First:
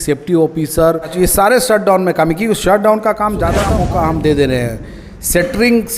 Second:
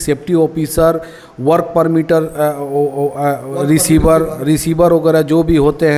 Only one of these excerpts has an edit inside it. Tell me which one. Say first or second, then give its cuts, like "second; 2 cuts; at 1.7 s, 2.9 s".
first; 2 cuts; at 1.1 s, 3.7 s